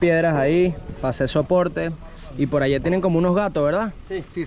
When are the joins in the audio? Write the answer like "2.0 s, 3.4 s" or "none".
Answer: none